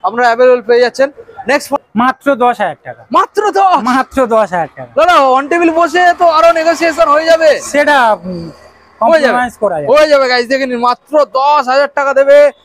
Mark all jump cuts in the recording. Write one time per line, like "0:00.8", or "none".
0:01.7